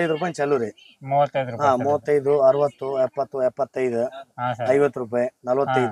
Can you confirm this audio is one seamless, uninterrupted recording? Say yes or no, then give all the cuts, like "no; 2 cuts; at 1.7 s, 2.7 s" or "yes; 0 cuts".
yes; 0 cuts